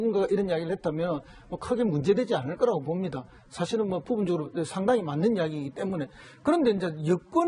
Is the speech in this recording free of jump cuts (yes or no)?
yes